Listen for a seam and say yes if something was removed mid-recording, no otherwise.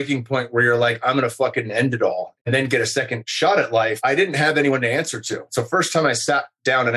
yes